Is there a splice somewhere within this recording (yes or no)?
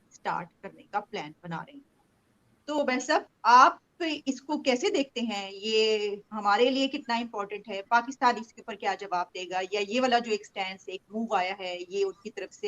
no